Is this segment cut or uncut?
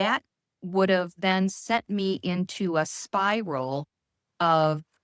uncut